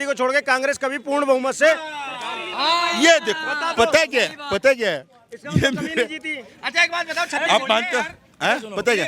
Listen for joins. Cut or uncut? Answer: uncut